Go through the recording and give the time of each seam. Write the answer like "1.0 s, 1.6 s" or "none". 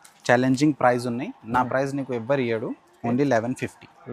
none

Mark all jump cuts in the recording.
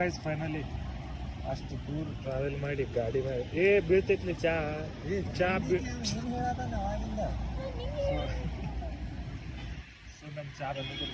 none

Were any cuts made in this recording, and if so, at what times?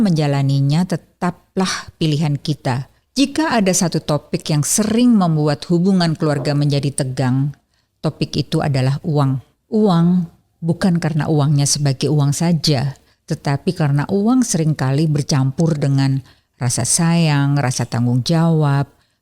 3.0 s

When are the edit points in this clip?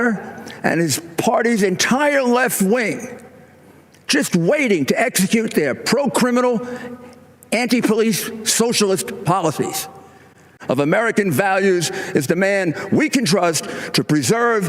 10.5 s

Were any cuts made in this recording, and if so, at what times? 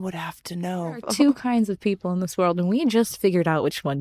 1.1 s

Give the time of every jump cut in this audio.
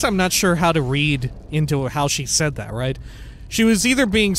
none

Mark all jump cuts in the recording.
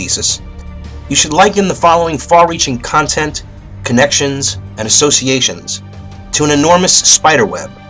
2.0 s

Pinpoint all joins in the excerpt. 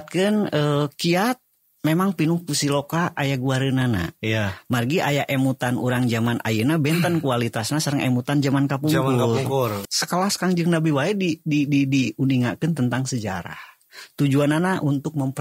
9.8 s

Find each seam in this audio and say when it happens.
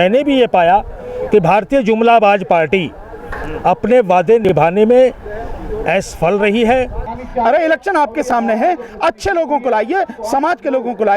7.6 s

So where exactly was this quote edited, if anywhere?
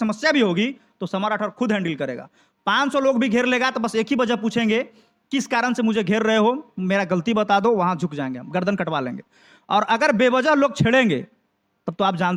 none

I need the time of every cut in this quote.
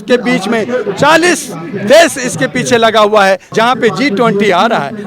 3.5 s

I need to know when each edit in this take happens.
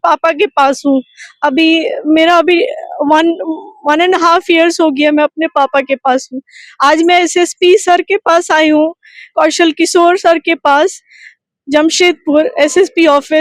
none

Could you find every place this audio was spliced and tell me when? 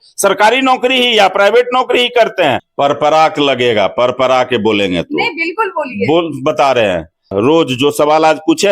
2.7 s, 7.3 s

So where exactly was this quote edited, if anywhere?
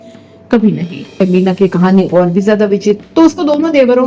1.2 s, 3.0 s

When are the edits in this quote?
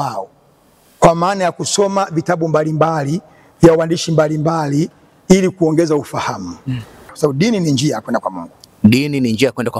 7.1 s

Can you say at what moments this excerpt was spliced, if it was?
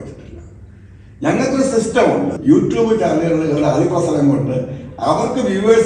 2.4 s

